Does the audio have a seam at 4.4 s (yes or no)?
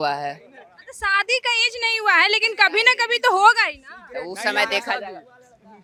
no